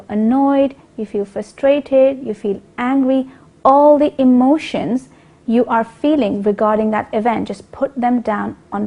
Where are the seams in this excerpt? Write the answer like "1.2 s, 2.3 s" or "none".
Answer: 2.7 s

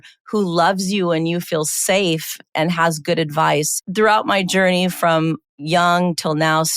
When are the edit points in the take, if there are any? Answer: 3.7 s

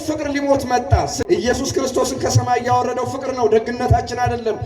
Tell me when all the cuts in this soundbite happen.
1.2 s

